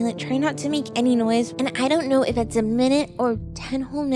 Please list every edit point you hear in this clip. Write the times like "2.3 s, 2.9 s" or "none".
1.5 s